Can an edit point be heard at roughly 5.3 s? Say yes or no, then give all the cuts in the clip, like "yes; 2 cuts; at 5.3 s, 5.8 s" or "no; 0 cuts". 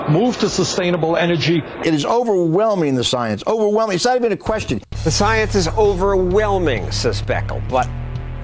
no; 0 cuts